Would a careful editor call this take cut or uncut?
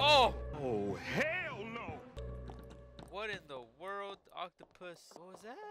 uncut